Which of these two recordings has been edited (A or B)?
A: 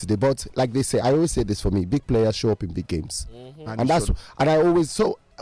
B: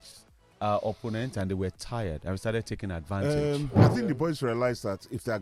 B